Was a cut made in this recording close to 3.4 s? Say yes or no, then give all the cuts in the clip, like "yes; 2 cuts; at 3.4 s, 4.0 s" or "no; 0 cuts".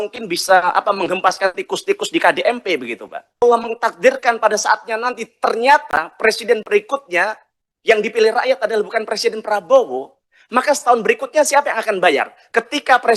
yes; 1 cut; at 3.4 s